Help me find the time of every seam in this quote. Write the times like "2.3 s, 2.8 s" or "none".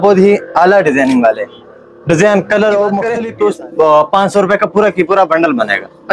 3.2 s